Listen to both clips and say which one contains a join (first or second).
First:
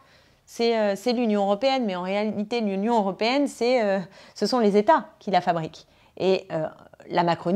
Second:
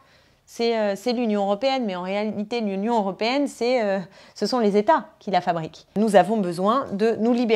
second